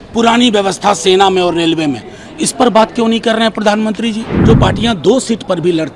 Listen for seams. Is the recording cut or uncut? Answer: cut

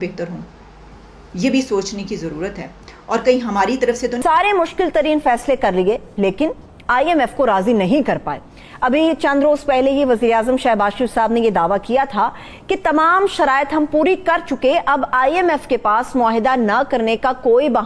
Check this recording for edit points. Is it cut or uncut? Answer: cut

